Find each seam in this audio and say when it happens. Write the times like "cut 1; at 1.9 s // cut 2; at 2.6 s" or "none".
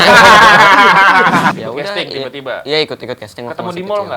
cut 1; at 1.5 s